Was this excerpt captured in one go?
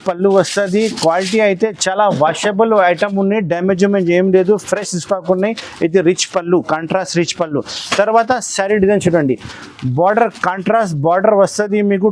yes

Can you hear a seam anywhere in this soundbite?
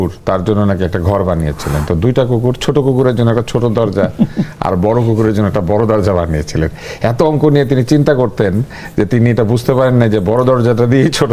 no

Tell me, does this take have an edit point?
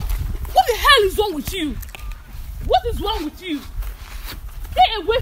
no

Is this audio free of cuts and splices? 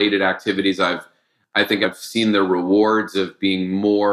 no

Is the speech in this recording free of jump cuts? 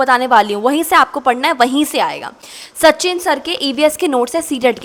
yes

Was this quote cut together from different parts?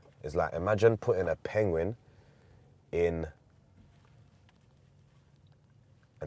no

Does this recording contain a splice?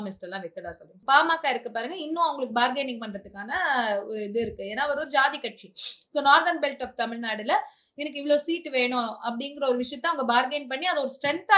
yes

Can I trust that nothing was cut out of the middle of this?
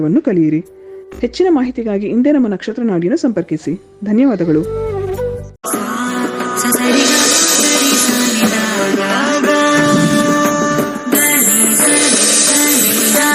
no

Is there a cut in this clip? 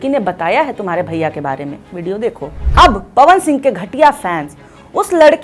yes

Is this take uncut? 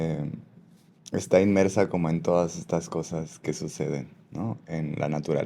yes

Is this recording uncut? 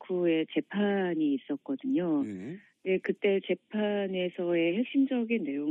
no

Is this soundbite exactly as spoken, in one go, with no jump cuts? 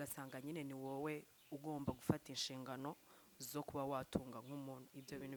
yes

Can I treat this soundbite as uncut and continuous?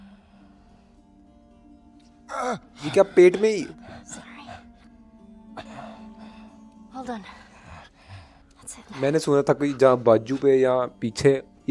yes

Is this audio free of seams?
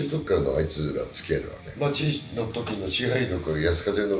no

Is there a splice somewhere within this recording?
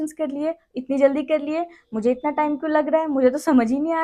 no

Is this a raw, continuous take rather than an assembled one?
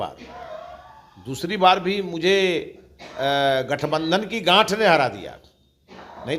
yes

